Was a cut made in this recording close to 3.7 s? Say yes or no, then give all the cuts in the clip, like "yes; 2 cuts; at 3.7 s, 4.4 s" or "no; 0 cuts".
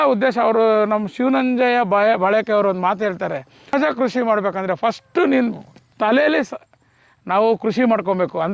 yes; 1 cut; at 3.7 s